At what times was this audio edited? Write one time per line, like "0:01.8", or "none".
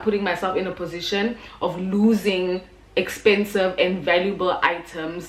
none